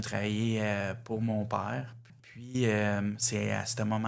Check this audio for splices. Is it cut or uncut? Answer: cut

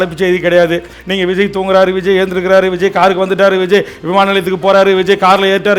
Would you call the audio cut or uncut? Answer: uncut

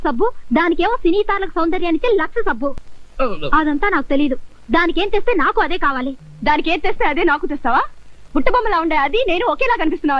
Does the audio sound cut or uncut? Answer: cut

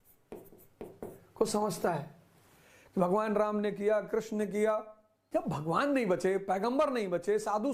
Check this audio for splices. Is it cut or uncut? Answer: uncut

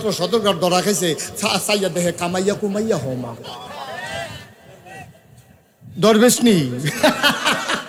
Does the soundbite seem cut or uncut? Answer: uncut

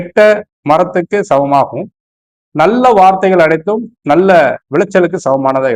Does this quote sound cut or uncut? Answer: uncut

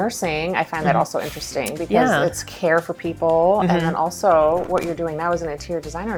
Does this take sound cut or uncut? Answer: uncut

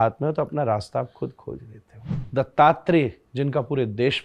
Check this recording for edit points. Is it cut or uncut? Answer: cut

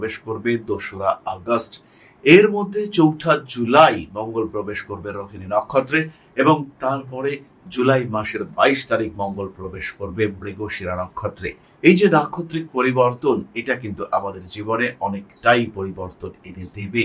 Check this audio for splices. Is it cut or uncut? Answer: uncut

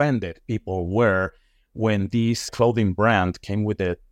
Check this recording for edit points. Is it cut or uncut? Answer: uncut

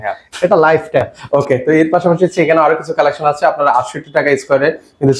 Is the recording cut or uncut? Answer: cut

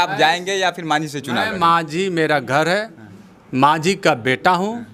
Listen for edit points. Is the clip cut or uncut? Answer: uncut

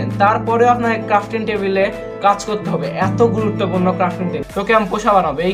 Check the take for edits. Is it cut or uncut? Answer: cut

